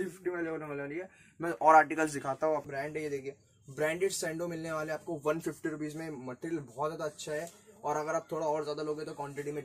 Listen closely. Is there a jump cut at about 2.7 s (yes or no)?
yes